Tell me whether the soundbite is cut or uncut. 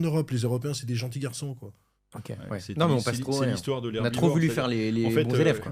uncut